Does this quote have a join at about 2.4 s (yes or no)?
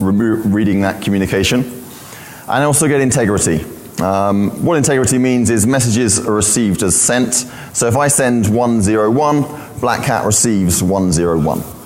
no